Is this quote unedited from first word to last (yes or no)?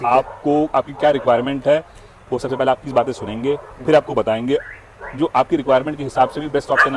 yes